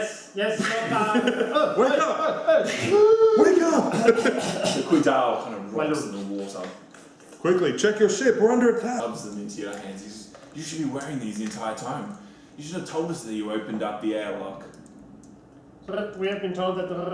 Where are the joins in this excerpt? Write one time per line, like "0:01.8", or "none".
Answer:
0:09.0